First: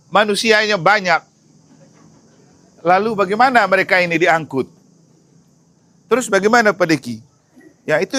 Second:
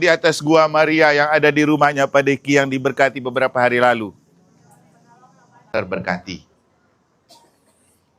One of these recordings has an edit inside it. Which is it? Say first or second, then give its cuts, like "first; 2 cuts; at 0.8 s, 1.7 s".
second; 1 cut; at 5.7 s